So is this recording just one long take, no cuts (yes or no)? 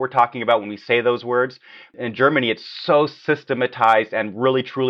no